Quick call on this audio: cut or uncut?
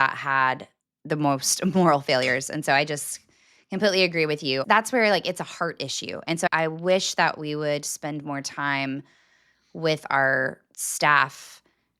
cut